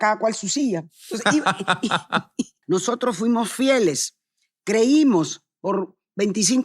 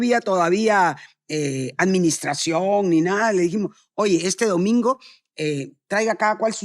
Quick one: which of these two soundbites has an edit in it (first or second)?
first